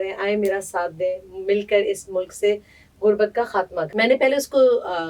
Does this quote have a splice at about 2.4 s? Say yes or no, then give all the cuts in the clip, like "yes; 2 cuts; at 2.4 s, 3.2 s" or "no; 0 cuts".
no; 1 cut; at 3.9 s